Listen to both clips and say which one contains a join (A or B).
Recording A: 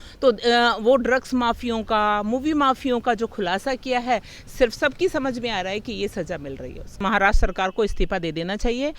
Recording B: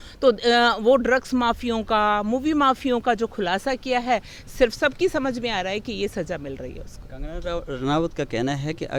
A